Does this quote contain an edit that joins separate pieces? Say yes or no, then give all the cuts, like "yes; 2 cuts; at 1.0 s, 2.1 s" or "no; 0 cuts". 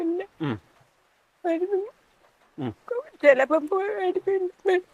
no; 0 cuts